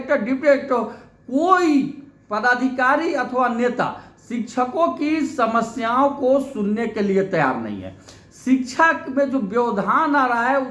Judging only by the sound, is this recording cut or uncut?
uncut